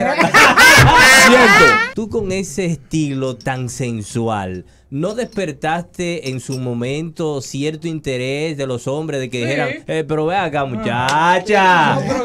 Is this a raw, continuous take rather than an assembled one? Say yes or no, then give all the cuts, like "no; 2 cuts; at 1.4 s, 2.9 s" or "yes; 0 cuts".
no; 1 cut; at 1.9 s